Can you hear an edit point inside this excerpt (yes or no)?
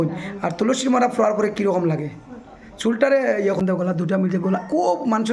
yes